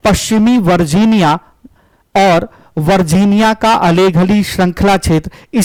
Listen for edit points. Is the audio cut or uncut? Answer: uncut